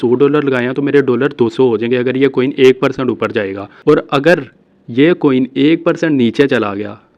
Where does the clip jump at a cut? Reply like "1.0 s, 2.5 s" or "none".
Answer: 3.6 s